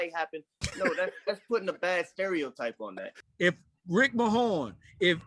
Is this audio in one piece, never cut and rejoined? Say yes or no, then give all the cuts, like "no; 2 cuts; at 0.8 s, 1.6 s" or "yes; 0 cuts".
no; 1 cut; at 3.1 s